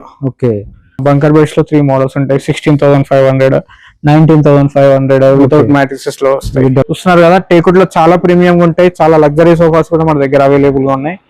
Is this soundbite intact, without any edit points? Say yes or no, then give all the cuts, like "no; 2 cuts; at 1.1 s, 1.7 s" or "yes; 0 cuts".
no; 2 cuts; at 1.0 s, 6.8 s